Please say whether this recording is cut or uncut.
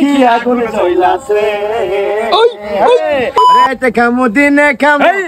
cut